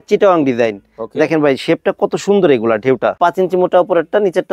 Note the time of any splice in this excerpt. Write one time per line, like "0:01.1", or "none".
0:03.2